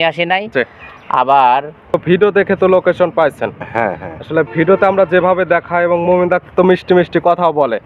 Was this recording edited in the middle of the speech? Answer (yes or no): yes